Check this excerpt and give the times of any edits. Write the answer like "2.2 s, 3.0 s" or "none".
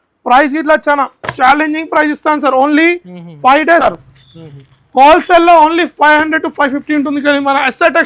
3.8 s

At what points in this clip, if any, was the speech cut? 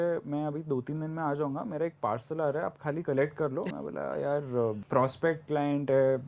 3.7 s, 4.8 s

